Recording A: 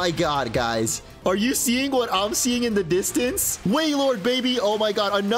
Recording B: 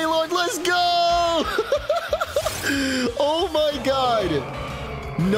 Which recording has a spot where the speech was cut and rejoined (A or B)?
A